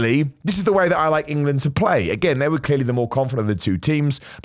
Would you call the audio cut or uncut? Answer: uncut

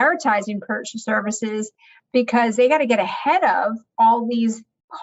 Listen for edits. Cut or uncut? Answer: uncut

